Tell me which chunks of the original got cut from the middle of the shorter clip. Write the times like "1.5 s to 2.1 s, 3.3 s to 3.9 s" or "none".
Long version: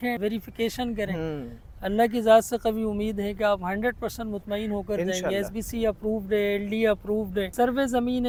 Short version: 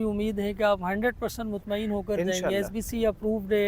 none